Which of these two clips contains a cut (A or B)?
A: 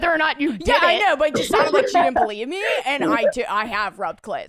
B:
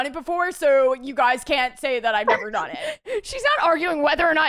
B